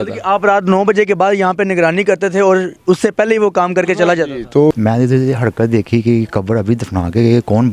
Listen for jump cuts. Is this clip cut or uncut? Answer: cut